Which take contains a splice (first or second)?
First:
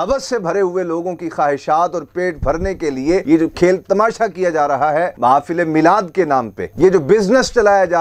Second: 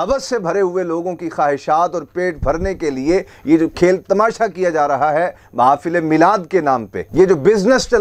first